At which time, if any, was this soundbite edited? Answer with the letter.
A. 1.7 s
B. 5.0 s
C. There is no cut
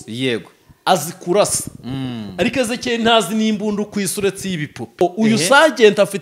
B